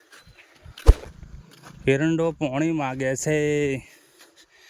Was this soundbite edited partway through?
yes; 1 cut; at 1.0 s

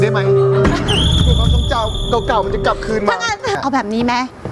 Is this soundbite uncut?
no; 1 cut; at 3.6 s

